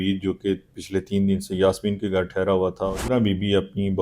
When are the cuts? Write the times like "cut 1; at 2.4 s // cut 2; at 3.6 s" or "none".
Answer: cut 1; at 3.0 s

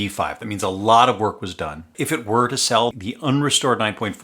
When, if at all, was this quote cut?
cut 1; at 1.9 s // cut 2; at 3.1 s

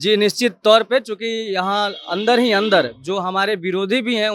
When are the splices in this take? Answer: none

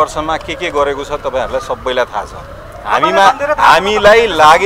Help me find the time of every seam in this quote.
none

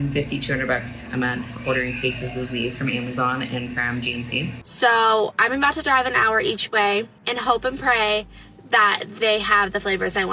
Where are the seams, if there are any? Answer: cut 1; at 4.6 s // cut 2; at 7.2 s

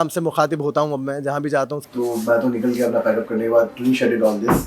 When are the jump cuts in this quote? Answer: cut 1; at 1.8 s

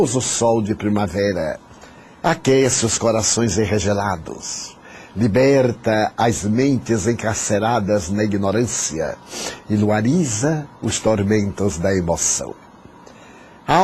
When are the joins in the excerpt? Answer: none

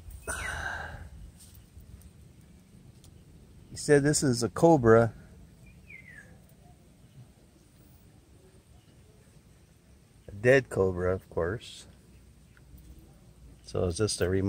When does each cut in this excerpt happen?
none

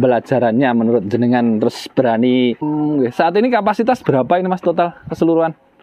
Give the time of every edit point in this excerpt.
cut 1; at 2.6 s

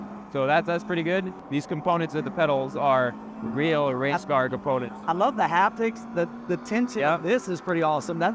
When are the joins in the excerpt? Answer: cut 1; at 1.4 s

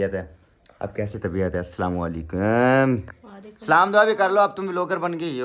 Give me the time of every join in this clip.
none

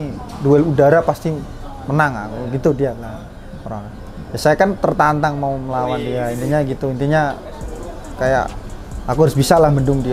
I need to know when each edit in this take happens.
none

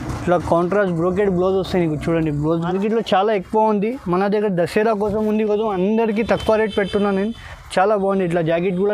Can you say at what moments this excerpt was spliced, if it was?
cut 1; at 2.7 s

